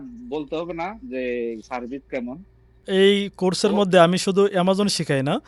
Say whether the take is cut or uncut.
cut